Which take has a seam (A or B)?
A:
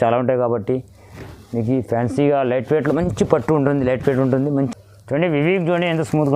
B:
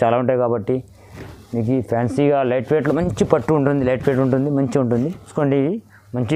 A